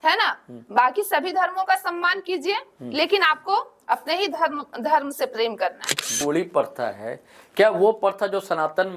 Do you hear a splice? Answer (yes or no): yes